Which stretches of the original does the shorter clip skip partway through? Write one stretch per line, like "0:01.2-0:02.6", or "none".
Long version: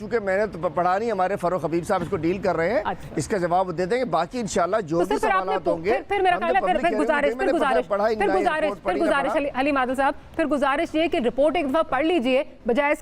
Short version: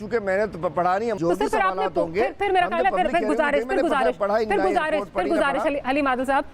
0:01.2-0:04.9